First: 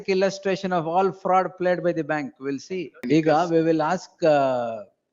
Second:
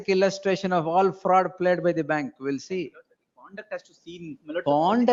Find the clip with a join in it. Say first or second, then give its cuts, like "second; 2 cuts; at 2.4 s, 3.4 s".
first; 1 cut; at 3.0 s